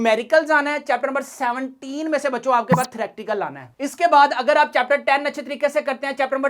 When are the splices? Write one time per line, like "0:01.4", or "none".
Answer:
none